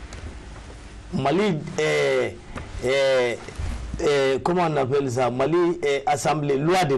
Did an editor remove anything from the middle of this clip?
no; 0 cuts

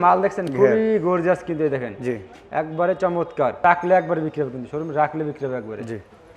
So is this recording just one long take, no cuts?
no; 1 cut; at 3.6 s

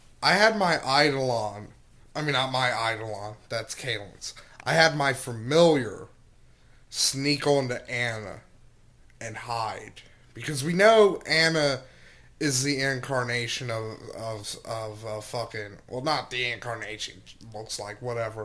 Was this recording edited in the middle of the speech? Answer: yes; 1 cut; at 14.4 s

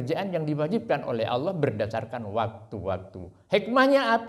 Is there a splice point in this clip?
no; 0 cuts

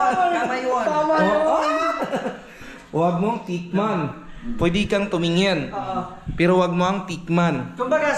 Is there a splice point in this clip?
no; 0 cuts

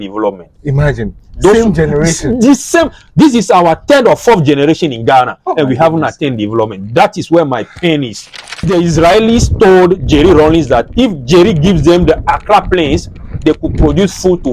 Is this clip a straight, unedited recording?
no; 1 cut; at 8.6 s

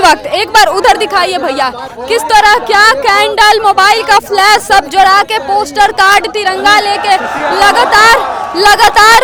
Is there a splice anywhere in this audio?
no; 0 cuts

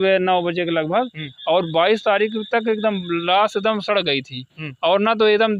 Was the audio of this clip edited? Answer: no; 0 cuts

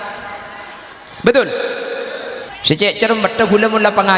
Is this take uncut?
no; 1 cut; at 2.5 s

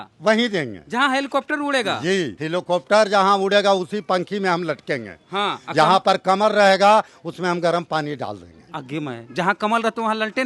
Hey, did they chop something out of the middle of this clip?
yes; 1 cut; at 2.4 s

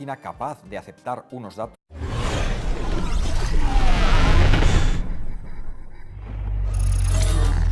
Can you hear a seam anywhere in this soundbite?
no; 0 cuts

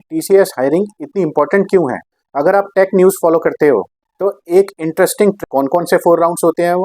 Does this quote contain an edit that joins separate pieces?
yes; 1 cut; at 5.4 s

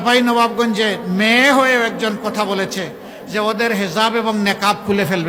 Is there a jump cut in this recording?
no; 0 cuts

